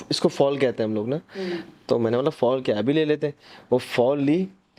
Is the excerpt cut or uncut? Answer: uncut